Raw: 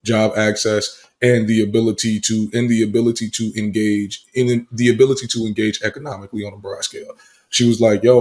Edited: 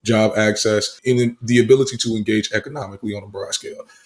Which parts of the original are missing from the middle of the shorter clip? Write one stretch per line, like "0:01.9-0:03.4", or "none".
0:00.9-0:04.2

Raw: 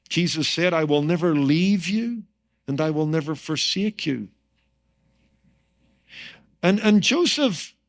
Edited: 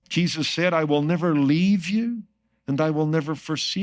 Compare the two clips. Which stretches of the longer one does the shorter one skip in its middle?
none

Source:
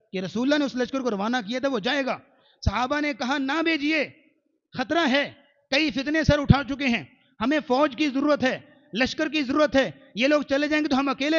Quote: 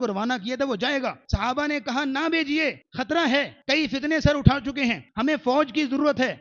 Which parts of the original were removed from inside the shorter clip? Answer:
0:02.3-0:02.6
0:04.2-0:04.7
0:05.4-0:05.6
0:07.1-0:07.3

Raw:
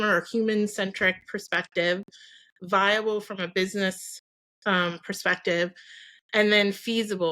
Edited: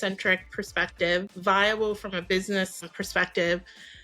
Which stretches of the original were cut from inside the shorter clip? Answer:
0:02.1-0:02.6
0:04.2-0:05.1

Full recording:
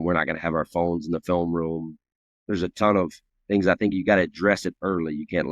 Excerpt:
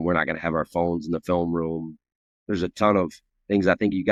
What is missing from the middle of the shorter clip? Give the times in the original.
none

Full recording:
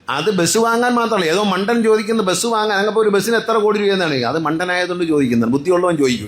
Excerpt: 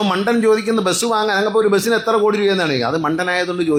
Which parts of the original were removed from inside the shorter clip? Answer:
none

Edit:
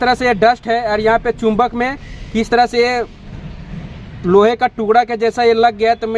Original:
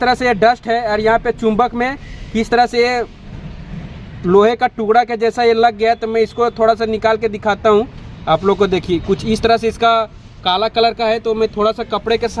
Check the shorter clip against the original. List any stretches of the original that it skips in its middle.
none

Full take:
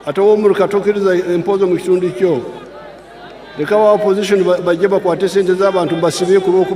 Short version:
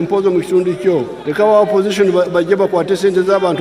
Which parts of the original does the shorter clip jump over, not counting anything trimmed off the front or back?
0:02.5-0:03.5

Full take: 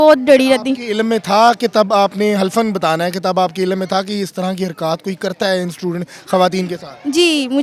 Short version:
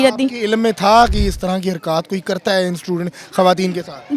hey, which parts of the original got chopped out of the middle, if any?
0:01.6-0:04.1

